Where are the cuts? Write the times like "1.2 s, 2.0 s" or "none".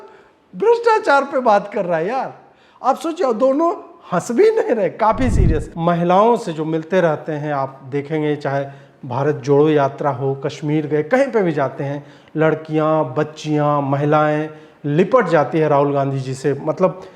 5.6 s